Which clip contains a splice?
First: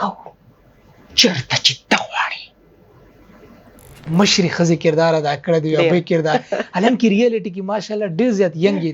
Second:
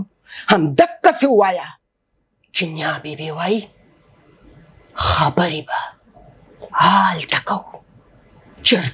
first; 1 cut; at 4.0 s

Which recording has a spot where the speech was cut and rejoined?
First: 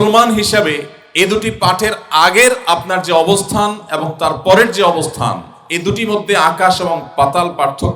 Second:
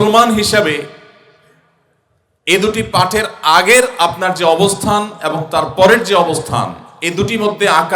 first; 1 cut; at 1.0 s

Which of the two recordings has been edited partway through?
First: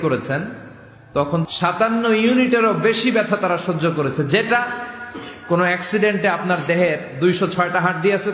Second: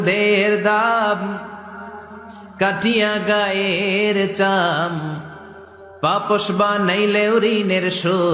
first; 1 cut; at 1.4 s

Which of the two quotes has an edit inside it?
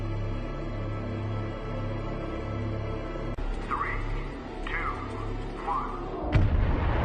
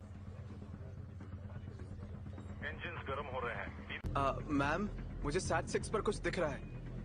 second; 1 cut; at 4.0 s

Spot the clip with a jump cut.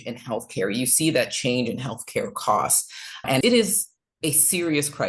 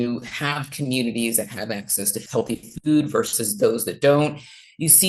second; 1 cut; at 2.1 s

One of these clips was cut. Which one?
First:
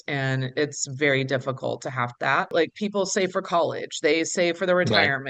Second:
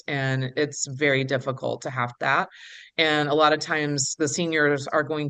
first; 1 cut; at 2.5 s

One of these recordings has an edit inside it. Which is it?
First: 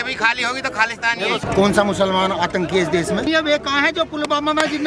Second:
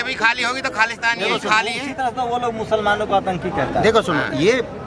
first; 2 cuts; at 1.4 s, 3.3 s

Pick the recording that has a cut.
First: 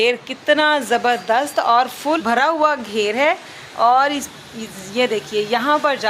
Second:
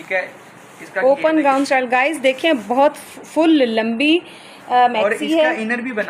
first; 1 cut; at 2.2 s

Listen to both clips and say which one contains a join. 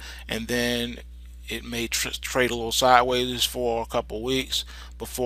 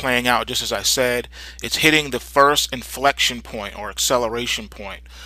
first; 1 cut; at 2.6 s

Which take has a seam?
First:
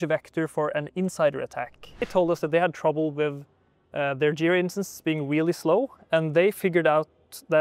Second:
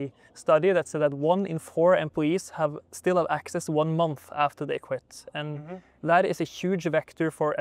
first; 1 cut; at 2.1 s

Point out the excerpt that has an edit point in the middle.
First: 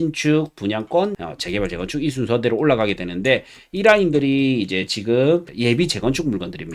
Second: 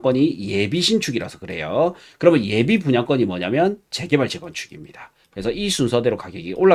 first; 2 cuts; at 1.3 s, 5.5 s

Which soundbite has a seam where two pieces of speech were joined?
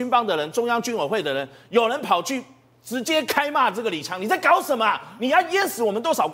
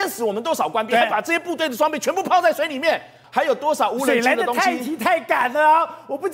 second; 1 cut; at 3.2 s

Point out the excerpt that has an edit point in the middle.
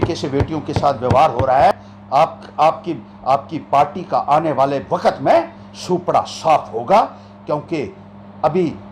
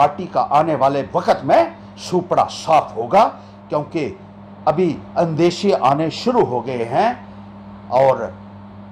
first; 1 cut; at 1.7 s

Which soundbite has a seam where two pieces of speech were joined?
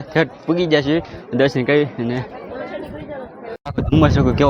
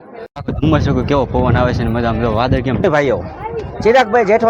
second; 1 cut; at 2.8 s

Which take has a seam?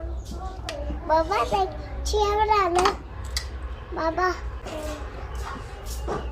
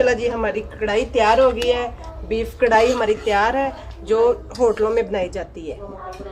first; 1 cut; at 4.6 s

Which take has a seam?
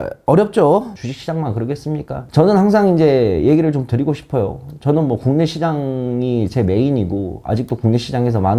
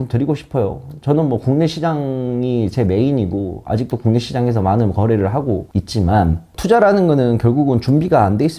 first; 2 cuts; at 0.9 s, 2.2 s

